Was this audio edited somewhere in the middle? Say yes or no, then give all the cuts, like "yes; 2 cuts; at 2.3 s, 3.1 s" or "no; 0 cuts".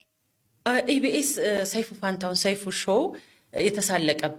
no; 0 cuts